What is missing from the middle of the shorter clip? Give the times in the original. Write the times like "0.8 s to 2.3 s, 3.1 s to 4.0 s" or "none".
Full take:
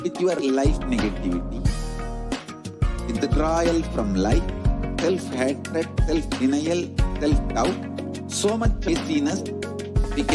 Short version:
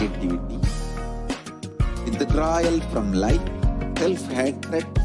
none